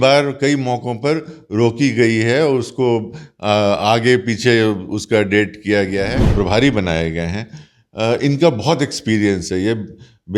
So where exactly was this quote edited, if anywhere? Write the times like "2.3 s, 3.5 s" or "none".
6.2 s